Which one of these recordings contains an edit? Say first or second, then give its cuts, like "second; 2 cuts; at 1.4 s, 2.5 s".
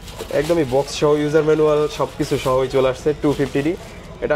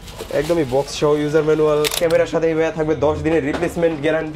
second; 1 cut; at 2.0 s